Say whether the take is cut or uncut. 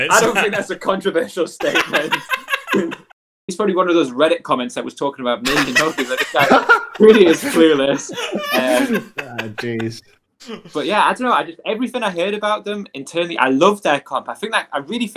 cut